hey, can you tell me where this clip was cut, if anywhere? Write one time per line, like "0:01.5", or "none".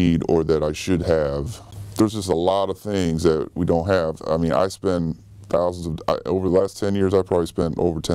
0:01.6